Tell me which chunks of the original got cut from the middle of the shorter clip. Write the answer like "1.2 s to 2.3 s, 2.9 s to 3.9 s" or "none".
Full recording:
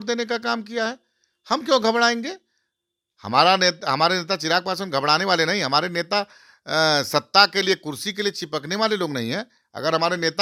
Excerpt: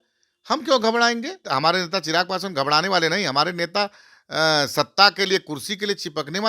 2.4 s to 3.8 s